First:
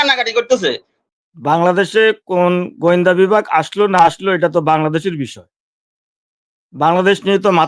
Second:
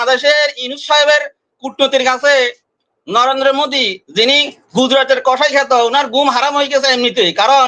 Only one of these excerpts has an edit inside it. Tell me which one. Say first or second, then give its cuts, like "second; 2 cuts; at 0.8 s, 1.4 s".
first; 1 cut; at 0.9 s